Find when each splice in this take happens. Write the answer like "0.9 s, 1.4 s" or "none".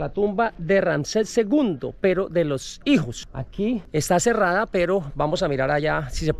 none